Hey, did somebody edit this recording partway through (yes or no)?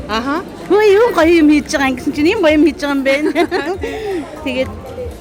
no